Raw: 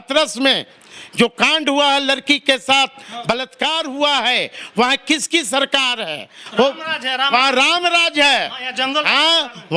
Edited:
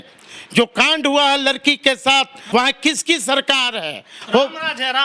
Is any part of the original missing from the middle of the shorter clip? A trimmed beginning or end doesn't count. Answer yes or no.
yes